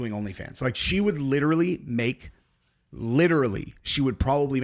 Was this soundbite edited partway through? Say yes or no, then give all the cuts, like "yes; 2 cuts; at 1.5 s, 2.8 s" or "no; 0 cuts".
no; 0 cuts